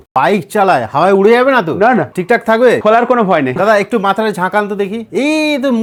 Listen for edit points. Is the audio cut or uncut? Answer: uncut